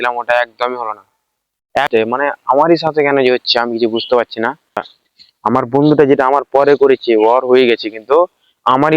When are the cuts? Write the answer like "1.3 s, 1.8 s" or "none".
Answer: 1.9 s, 4.9 s